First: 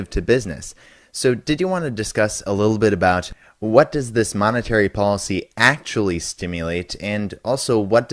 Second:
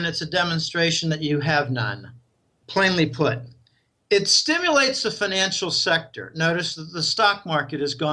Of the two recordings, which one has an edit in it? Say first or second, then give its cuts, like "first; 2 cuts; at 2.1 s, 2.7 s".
second; 1 cut; at 6.8 s